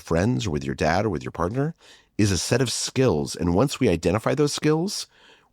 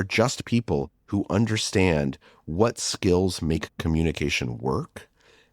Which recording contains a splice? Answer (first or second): second